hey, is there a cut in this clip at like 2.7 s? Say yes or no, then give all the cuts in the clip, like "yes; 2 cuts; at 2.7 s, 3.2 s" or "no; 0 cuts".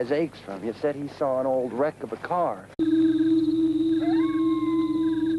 no; 0 cuts